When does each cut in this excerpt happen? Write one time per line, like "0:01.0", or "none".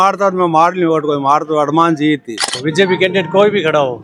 0:02.6